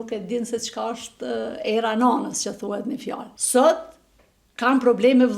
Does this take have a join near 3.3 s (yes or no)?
yes